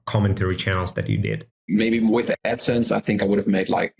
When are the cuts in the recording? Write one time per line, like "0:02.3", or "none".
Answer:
0:01.5